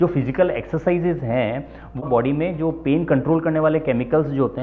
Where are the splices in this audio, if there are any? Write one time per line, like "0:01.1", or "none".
0:02.0